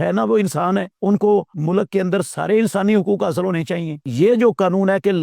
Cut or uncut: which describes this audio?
cut